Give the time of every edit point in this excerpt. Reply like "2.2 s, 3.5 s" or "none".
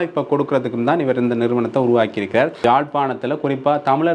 2.6 s